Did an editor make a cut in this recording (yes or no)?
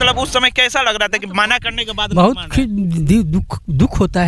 no